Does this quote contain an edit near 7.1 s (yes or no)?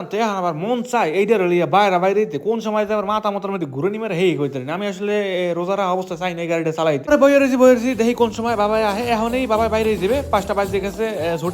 yes